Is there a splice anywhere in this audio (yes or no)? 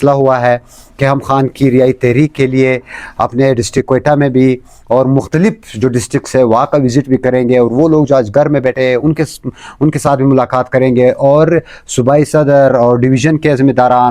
no